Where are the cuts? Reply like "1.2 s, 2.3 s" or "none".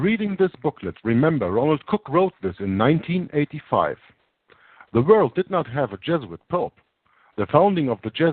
4.9 s